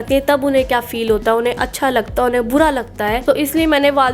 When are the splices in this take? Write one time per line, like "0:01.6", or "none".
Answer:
0:03.2